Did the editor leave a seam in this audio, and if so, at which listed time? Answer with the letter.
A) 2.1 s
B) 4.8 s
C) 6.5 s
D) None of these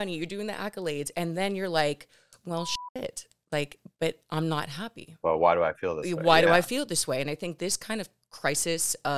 D